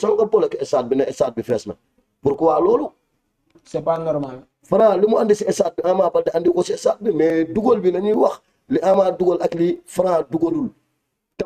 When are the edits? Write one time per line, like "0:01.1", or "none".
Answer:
none